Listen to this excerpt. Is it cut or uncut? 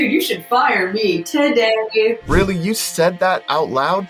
cut